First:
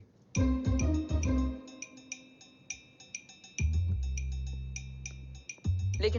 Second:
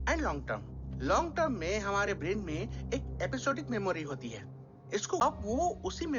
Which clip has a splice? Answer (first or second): second